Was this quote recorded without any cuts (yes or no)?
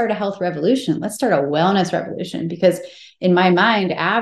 yes